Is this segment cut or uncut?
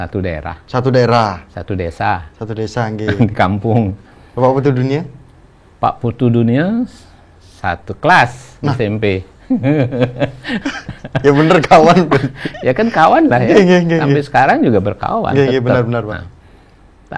uncut